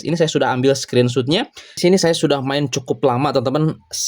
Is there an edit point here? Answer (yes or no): yes